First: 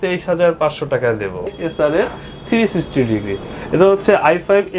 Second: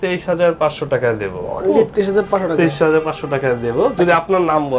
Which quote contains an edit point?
first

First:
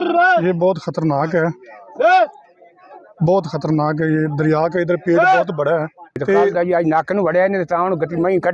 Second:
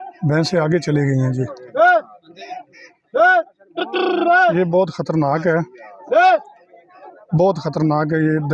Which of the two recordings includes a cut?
first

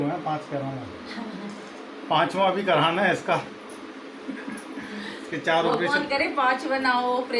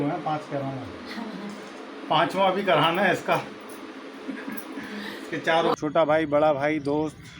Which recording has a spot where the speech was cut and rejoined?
second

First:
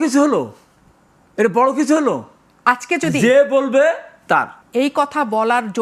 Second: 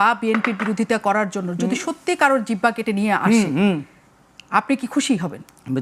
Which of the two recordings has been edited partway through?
first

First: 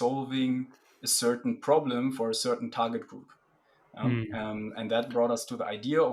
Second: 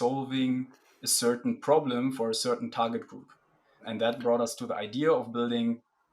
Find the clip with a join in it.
second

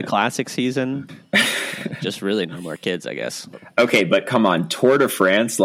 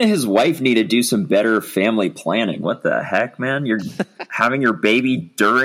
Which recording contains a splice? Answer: first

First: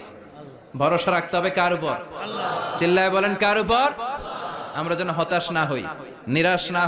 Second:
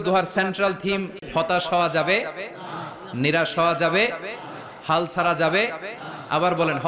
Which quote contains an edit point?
second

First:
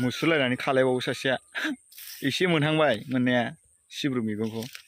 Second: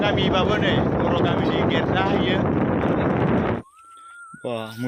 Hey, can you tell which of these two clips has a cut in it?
second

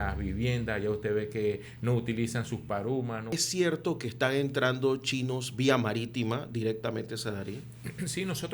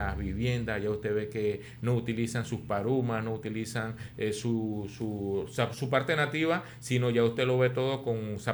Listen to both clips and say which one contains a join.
first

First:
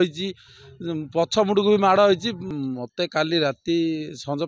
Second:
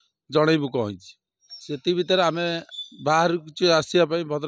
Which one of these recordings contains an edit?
first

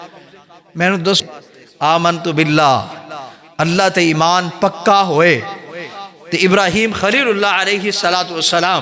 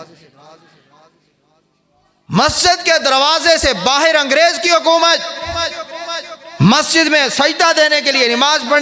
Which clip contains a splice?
first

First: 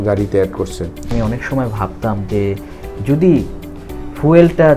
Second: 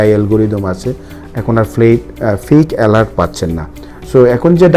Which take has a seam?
first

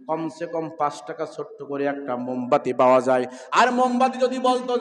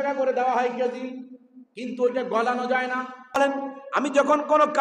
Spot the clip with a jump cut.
second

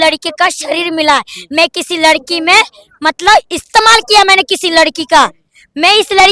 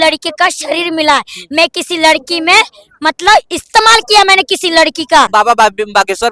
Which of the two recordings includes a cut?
second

